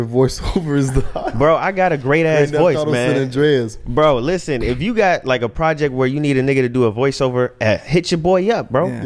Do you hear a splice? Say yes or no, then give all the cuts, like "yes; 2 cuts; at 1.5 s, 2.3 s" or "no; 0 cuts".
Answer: no; 0 cuts